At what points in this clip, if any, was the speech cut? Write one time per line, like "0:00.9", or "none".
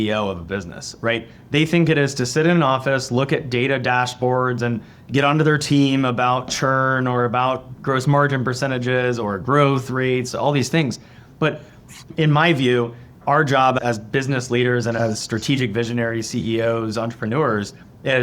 0:07.7
0:12.1

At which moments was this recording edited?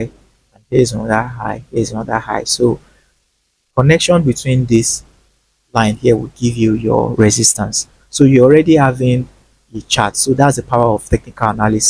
none

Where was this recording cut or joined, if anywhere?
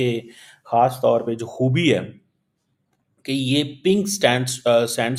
none

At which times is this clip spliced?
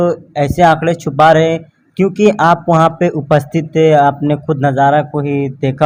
none

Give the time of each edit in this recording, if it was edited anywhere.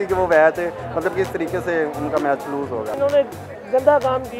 0:02.9

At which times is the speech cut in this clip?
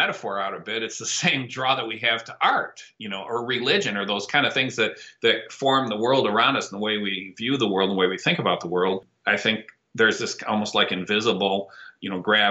0:09.1

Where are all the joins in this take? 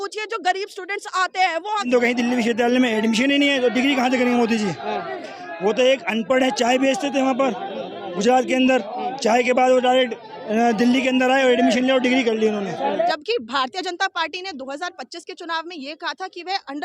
0:01.9
0:13.1

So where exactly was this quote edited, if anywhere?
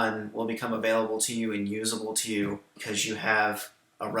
0:02.8

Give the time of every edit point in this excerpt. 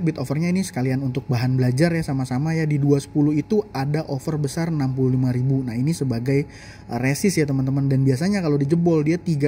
none

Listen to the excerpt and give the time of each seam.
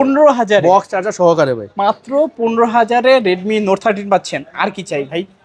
none

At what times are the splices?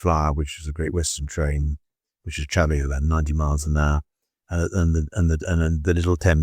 none

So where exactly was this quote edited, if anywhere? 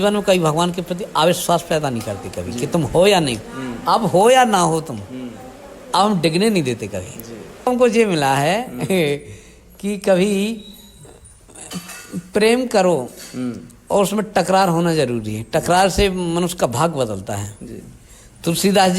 0:07.7

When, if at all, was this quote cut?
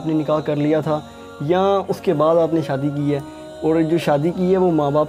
none

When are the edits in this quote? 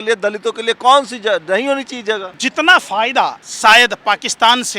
0:02.3
0:03.4

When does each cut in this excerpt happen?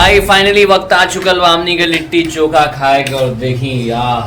none

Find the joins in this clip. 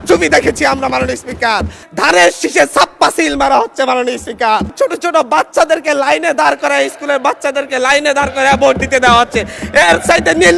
0:01.8
0:04.7

